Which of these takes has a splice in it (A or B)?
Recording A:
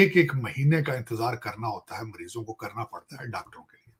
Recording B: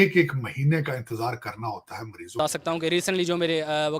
B